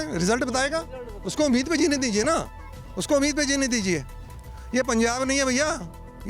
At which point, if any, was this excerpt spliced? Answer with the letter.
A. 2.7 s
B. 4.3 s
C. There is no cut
C